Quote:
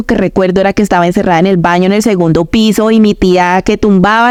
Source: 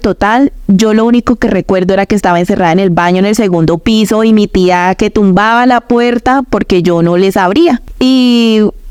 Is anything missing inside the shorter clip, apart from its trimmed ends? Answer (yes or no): no